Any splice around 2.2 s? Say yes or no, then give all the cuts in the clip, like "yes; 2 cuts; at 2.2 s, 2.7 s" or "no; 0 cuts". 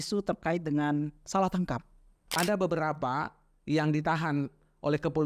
yes; 1 cut; at 2.2 s